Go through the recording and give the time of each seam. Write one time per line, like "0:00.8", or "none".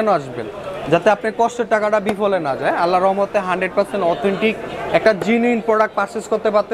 none